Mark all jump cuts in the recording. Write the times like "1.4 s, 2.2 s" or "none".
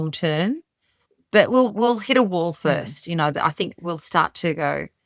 3.8 s